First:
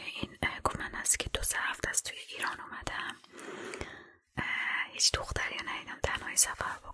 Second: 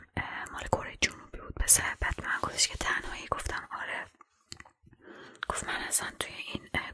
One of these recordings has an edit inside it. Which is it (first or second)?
second